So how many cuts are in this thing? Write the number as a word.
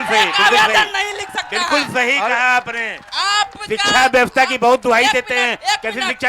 zero